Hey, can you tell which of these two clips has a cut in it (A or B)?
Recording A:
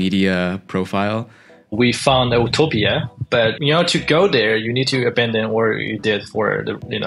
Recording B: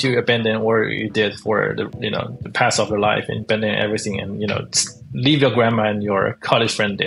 A